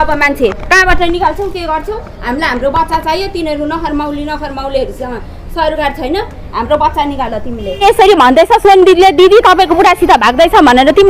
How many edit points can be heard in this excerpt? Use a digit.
1